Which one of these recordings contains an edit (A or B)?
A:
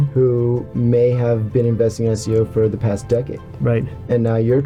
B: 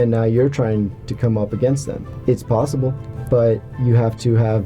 B